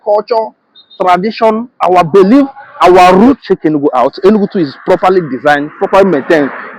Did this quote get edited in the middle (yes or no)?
yes